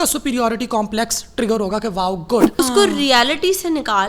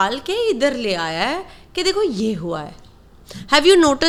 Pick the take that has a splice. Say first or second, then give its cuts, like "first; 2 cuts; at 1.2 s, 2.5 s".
first; 1 cut; at 2.5 s